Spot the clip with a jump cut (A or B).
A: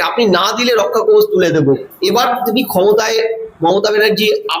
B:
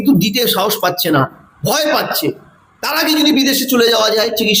A